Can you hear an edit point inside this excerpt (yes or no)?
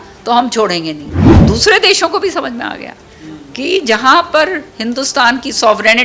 yes